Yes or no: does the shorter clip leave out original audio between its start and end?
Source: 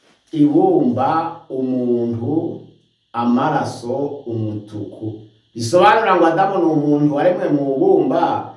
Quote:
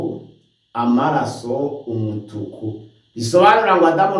no